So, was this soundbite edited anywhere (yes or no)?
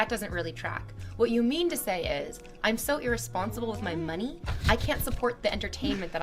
yes